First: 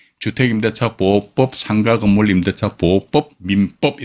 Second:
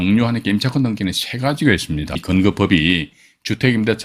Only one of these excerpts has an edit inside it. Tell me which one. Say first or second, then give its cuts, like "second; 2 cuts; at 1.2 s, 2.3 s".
second; 1 cut; at 2.2 s